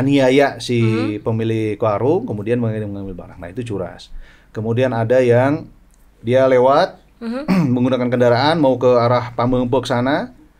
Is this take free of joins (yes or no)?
yes